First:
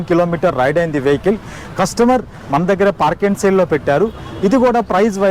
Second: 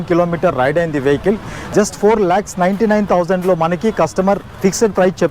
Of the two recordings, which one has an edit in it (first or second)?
second